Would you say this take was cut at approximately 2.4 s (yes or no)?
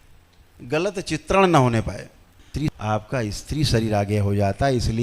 yes